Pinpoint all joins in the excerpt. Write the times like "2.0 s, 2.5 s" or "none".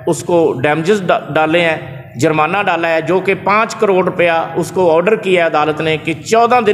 none